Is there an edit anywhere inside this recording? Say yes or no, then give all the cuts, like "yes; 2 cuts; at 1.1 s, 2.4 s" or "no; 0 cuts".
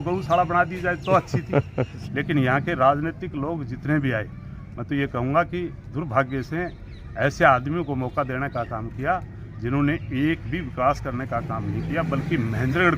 yes; 1 cut; at 2.0 s